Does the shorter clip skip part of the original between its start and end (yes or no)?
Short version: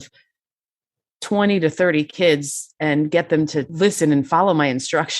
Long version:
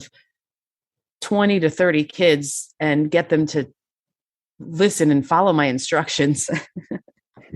yes